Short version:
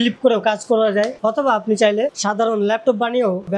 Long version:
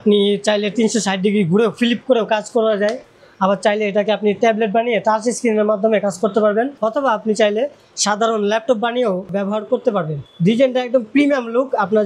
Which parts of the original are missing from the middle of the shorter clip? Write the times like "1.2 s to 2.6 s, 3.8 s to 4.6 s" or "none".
3.0 s to 6.7 s, 7.8 s to 8.0 s

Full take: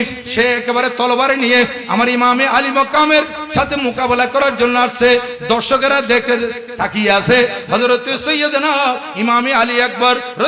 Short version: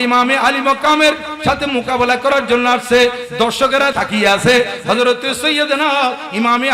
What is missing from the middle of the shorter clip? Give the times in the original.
6.0 s to 6.8 s

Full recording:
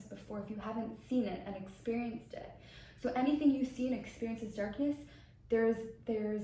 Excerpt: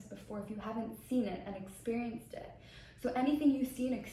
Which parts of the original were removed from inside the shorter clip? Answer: none

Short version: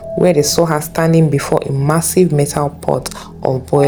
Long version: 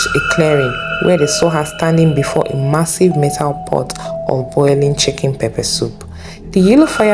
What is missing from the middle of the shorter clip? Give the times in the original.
none

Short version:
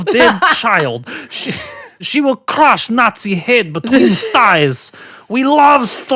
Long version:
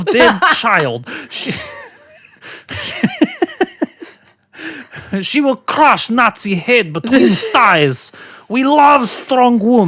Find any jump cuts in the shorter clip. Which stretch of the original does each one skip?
2.1 s to 5.3 s

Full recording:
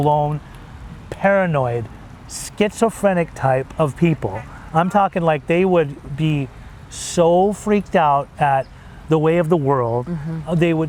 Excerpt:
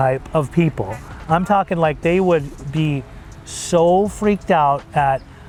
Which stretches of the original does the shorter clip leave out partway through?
none

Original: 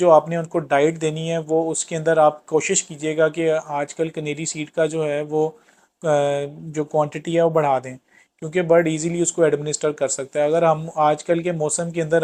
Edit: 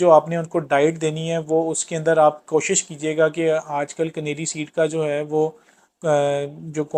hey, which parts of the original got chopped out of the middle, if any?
none

